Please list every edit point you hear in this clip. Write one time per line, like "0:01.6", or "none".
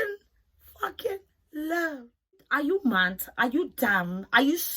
0:02.5

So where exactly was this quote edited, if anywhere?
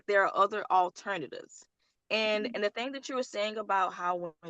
none

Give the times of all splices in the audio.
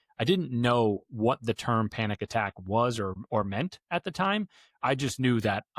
0:03.2

